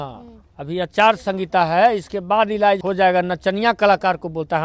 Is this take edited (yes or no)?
yes